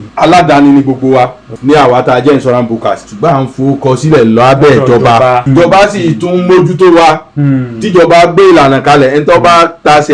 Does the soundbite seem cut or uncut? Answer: cut